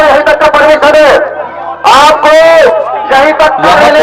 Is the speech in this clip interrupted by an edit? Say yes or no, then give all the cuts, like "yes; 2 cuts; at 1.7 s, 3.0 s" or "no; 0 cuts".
no; 0 cuts